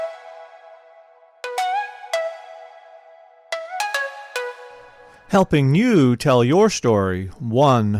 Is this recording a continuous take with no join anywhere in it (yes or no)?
yes